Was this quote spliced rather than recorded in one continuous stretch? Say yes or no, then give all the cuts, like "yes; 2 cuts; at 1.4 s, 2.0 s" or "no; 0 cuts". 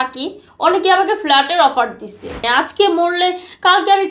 yes; 1 cut; at 2.4 s